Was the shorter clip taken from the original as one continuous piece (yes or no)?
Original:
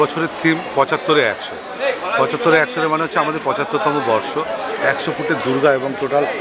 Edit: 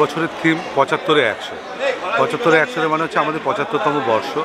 yes